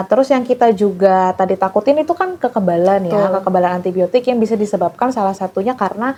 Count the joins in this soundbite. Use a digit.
0